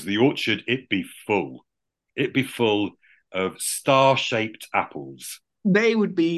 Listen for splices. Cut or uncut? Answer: uncut